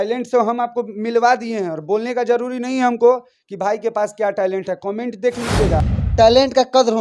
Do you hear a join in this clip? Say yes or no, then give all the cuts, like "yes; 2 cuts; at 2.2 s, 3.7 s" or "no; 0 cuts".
yes; 1 cut; at 6.0 s